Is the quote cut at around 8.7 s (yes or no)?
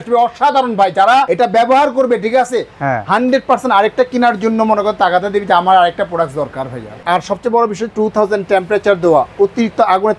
no